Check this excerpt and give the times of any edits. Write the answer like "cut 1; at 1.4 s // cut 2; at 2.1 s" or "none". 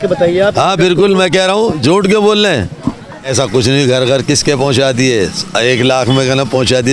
cut 1; at 3.1 s